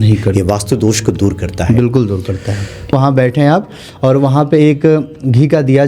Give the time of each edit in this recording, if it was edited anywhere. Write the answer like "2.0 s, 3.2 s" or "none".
2.9 s